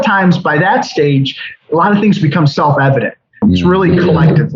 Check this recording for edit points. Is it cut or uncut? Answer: cut